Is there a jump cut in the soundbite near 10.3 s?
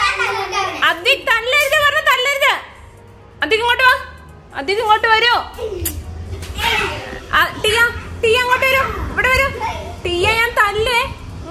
no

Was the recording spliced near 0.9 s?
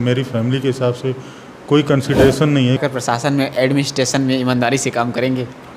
no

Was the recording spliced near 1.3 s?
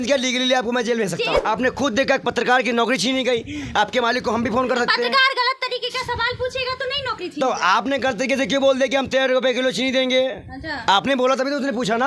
yes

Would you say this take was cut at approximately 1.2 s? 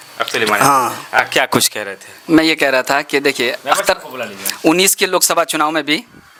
no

